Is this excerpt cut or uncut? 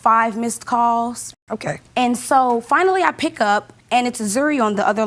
cut